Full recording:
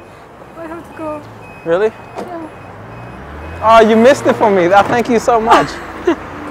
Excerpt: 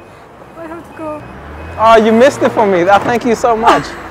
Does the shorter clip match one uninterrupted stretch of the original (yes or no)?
no